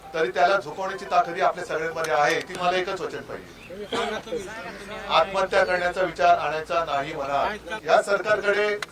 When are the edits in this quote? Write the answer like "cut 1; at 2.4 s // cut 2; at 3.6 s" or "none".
cut 1; at 2.5 s // cut 2; at 7.8 s